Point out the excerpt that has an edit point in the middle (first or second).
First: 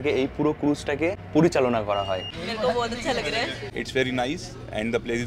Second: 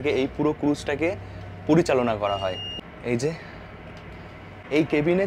first